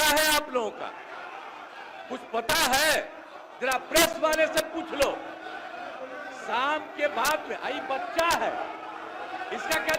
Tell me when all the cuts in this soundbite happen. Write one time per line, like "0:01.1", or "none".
none